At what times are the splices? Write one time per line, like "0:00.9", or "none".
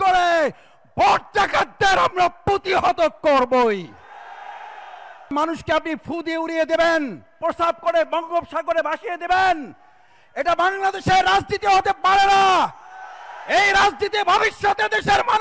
0:05.3
0:07.3